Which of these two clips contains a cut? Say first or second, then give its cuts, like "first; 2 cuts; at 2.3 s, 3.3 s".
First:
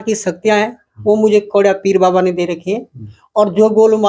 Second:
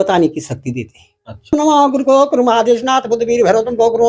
second; 1 cut; at 1.5 s